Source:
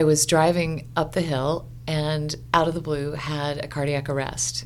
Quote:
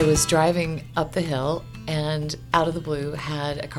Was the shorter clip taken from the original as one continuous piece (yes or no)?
yes